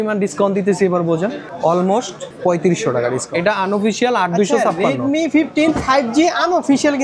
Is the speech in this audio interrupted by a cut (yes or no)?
yes